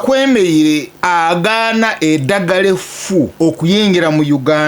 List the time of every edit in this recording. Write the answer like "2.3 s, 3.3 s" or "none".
0.9 s, 3.3 s

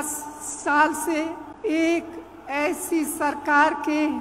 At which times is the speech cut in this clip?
1.5 s

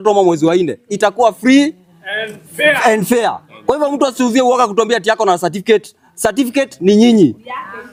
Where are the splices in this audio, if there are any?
none

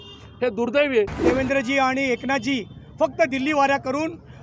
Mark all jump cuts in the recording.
1.2 s

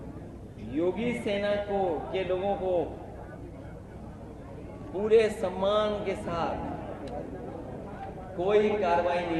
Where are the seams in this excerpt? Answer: none

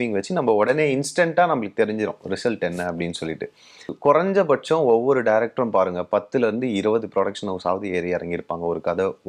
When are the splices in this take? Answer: 3.9 s

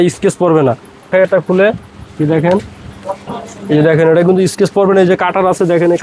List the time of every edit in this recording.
none

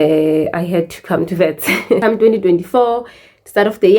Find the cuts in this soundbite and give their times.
2.0 s

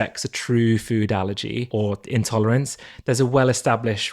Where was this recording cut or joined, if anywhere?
1.7 s

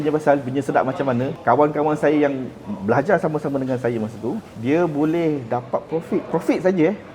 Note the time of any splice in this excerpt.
1.3 s, 4.5 s, 6.3 s

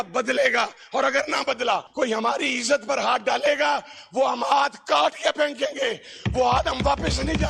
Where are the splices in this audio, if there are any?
1.9 s

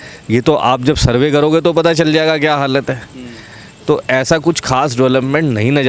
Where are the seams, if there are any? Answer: none

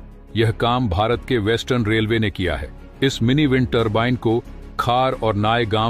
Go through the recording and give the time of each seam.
none

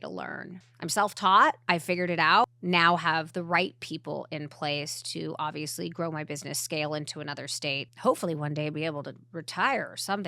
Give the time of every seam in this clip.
2.2 s, 7.9 s

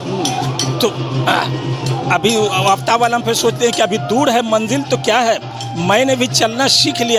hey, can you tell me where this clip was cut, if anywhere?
none

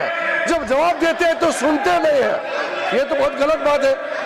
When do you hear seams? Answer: none

